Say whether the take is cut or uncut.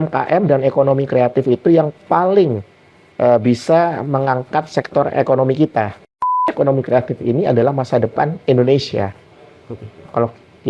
cut